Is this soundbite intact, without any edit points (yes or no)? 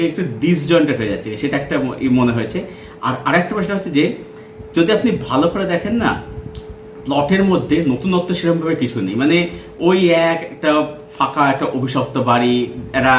yes